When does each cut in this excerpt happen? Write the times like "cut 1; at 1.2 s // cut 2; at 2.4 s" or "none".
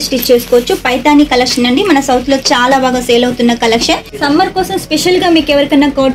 cut 1; at 4.1 s